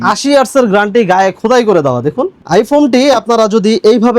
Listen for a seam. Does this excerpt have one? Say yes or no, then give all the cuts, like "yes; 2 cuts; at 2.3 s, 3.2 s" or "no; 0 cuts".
no; 0 cuts